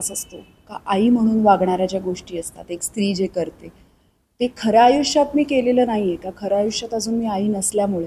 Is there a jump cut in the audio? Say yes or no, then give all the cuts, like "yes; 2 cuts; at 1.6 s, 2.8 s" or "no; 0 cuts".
no; 0 cuts